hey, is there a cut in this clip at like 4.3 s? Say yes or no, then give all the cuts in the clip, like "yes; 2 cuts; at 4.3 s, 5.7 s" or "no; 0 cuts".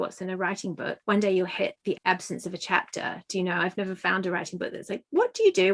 no; 2 cuts; at 1.0 s, 1.9 s